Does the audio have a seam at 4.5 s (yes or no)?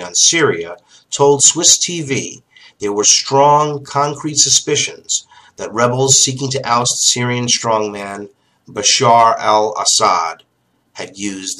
yes